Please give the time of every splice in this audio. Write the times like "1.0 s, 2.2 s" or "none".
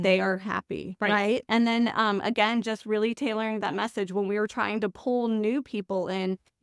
1.4 s